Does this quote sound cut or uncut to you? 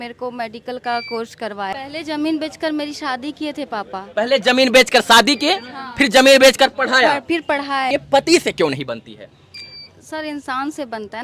cut